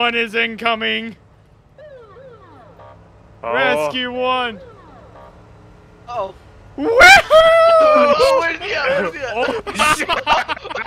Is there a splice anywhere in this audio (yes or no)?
no